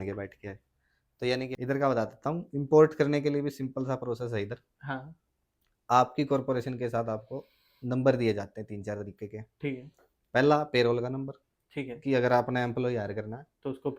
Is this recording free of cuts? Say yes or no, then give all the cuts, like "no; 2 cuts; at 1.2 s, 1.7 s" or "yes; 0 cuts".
no; 1 cut; at 1.5 s